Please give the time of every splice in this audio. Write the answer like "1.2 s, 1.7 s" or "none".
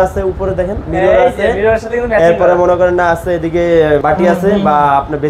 4.0 s